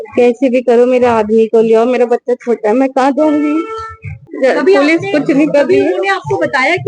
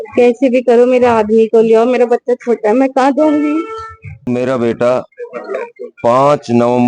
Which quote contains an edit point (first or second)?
second